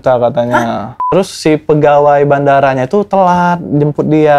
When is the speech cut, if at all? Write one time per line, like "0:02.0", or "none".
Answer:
0:01.1